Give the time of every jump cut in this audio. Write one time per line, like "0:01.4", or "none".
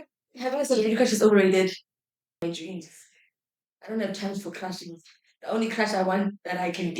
0:02.4